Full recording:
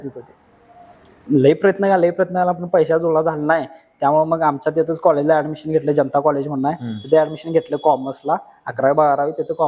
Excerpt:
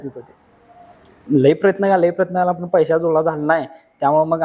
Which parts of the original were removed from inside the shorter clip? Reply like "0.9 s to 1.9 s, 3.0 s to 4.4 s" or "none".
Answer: none